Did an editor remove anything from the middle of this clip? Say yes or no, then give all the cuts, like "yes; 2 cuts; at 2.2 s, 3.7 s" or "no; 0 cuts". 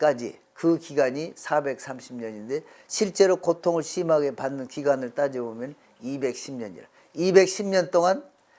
no; 0 cuts